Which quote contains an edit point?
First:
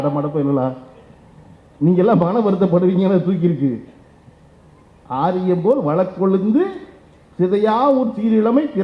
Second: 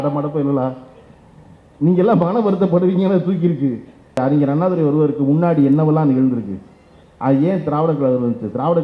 second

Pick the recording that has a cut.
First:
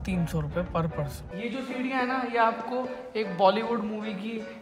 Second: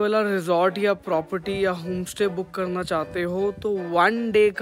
first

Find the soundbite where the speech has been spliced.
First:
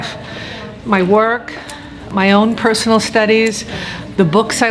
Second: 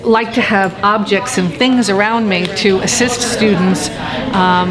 first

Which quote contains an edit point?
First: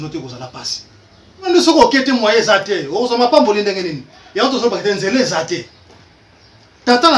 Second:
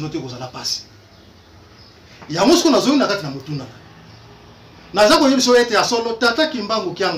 first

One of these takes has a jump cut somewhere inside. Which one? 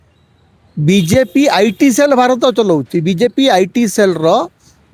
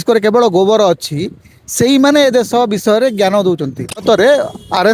second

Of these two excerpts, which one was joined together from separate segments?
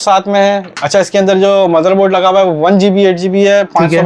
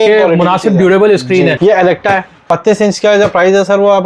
second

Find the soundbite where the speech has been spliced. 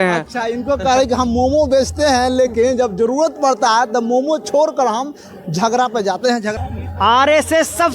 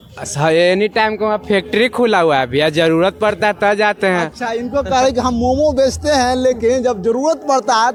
first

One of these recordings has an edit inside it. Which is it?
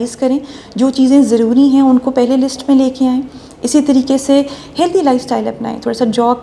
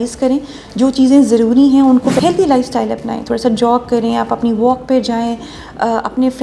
second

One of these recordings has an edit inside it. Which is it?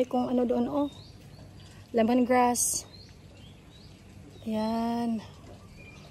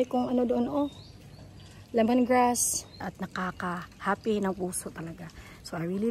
second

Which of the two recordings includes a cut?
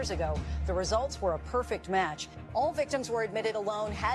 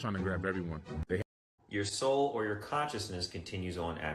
second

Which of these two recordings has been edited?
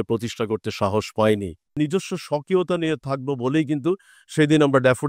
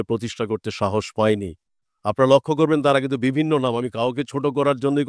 first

